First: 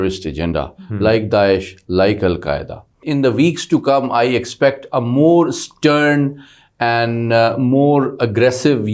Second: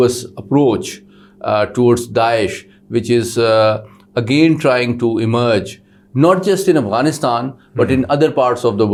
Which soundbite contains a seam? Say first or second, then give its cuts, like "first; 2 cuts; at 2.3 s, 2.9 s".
first; 1 cut; at 3.0 s